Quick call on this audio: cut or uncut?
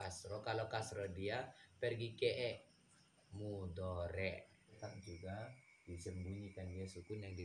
cut